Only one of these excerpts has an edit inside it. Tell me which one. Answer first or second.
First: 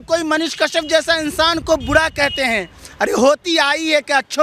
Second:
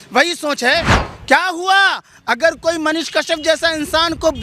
second